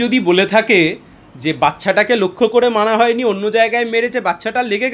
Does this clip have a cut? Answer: no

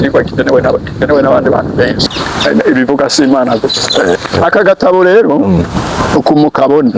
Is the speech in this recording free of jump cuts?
no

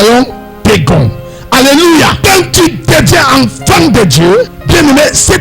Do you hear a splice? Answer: yes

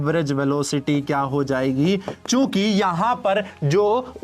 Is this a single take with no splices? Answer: no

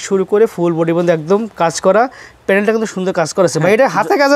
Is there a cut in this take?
no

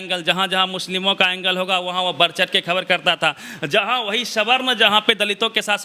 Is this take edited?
no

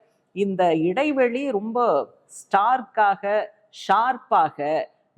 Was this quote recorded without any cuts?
yes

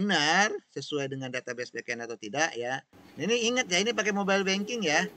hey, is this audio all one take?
no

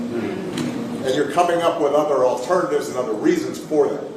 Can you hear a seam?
yes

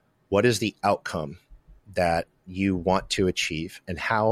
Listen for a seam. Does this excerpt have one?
no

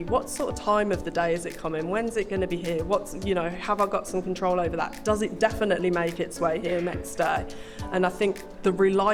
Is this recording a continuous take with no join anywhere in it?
yes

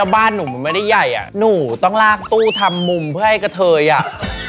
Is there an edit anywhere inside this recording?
yes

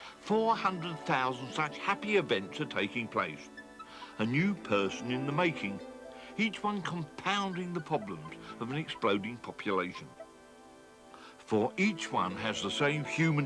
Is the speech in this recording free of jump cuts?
no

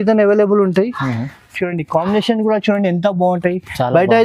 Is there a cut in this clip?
no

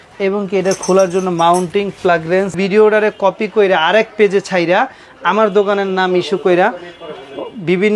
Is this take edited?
yes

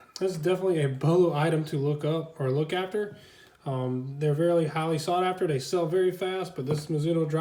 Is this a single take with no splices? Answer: yes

